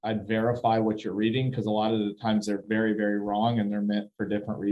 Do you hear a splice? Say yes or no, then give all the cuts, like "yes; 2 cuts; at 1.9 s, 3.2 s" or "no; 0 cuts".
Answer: no; 0 cuts